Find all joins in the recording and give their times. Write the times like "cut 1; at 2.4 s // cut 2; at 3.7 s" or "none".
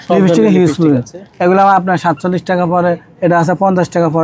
none